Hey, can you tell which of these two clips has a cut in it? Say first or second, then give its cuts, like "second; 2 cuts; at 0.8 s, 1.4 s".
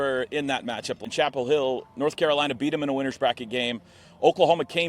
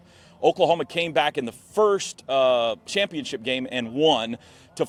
first; 1 cut; at 1.0 s